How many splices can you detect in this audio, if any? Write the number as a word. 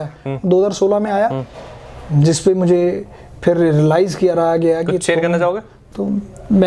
zero